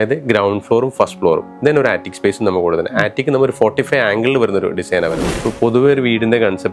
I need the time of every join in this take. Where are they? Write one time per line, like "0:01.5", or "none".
0:05.4